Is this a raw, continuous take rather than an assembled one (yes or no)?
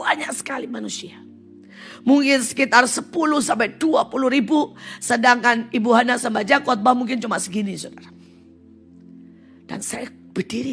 yes